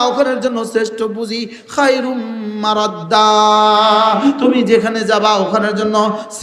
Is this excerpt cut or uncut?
uncut